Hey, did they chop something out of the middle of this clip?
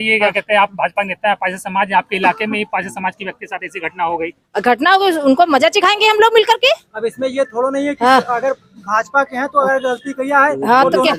no; 0 cuts

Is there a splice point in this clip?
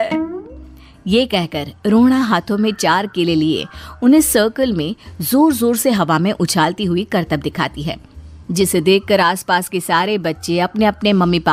no; 0 cuts

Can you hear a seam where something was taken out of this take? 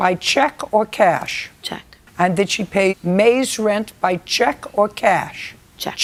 no; 0 cuts

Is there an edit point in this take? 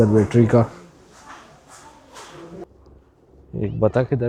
yes; 1 cut; at 2.8 s

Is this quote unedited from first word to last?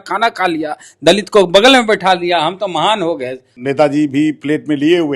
no; 1 cut; at 3.4 s

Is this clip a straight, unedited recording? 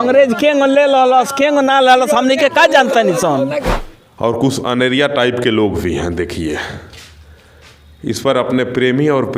no; 1 cut; at 3.7 s

